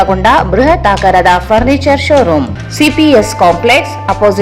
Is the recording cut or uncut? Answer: cut